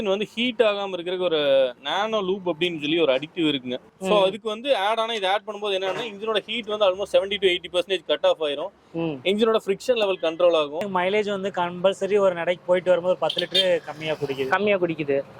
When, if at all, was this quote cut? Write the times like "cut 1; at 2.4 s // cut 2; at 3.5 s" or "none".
cut 1; at 3.9 s // cut 2; at 10.9 s

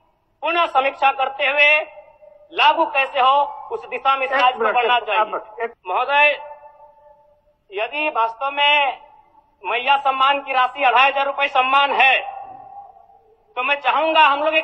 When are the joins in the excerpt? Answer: cut 1; at 5.8 s

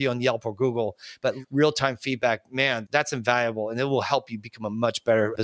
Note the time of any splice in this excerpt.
cut 1; at 1.4 s

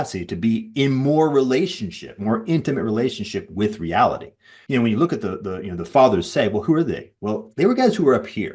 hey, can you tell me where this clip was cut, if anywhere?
cut 1; at 4.6 s

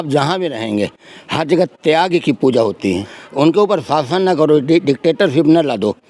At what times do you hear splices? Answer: cut 1; at 3.2 s

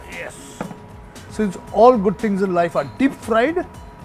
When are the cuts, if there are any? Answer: none

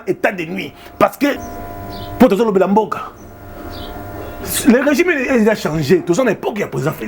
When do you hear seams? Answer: cut 1; at 1.4 s

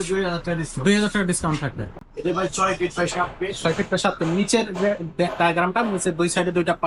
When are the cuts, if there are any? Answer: cut 1; at 2.1 s

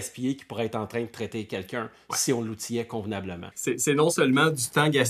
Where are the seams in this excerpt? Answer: cut 1; at 3.4 s

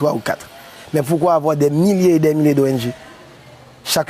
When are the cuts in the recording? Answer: cut 1; at 1.1 s

